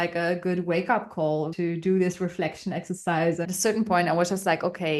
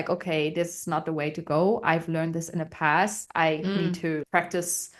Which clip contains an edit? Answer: first; 2 cuts; at 1.5 s, 3.5 s

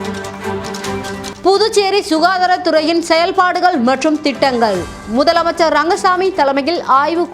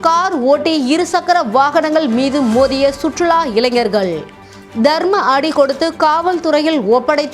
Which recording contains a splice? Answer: first; 1 cut; at 0.9 s

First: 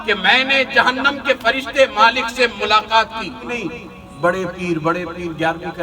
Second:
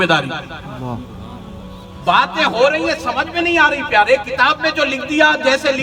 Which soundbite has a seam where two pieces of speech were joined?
first; 1 cut; at 3.4 s

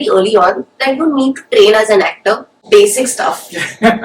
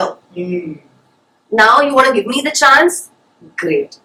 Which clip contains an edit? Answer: first; 1 cut; at 2.5 s

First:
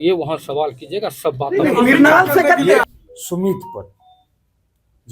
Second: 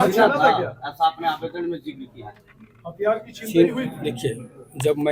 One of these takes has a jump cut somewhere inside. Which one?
first; 1 cut; at 2.9 s

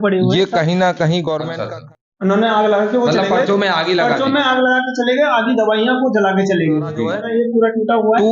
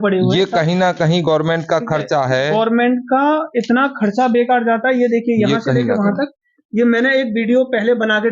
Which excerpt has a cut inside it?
first; 2 cuts; at 1.5 s, 7.1 s

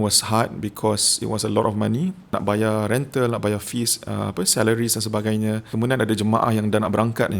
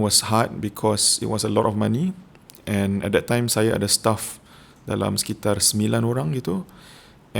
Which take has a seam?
first; 2 cuts; at 2.3 s, 5.7 s

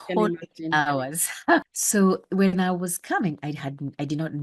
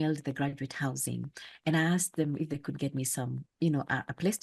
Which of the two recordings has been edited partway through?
first; 1 cut; at 1.6 s

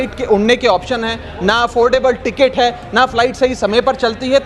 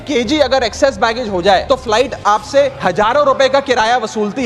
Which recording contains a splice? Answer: second; 2 cuts; at 1.6 s, 2.8 s

